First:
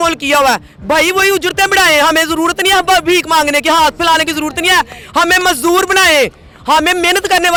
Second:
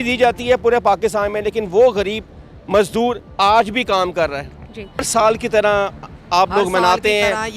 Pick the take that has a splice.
second; 1 cut; at 5.1 s

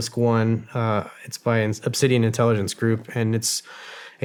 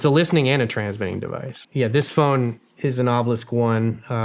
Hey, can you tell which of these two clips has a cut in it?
second; 1 cut; at 1.6 s

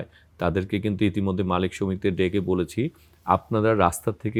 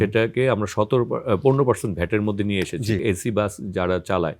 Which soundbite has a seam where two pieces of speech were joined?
second; 1 cut; at 3.0 s

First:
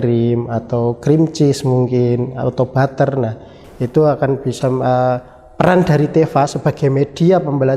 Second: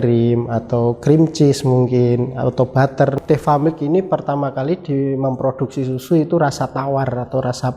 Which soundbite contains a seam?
second; 1 cut; at 3.2 s

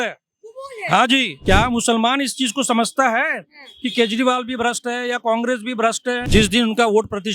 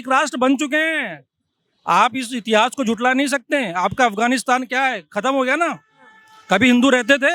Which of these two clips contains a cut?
first; 2 cuts; at 1.3 s, 6.1 s

